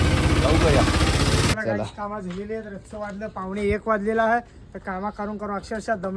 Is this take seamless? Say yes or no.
no